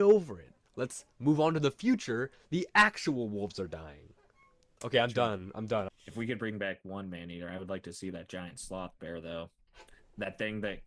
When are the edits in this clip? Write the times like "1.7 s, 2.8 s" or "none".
5.9 s